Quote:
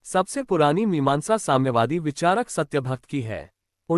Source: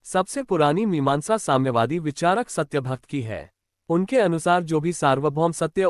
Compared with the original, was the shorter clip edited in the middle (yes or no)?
no